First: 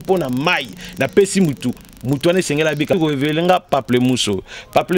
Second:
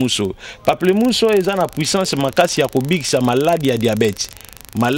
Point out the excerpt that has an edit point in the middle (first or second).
first